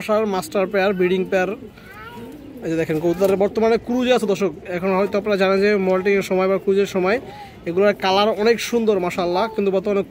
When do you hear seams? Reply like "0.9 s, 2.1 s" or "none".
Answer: none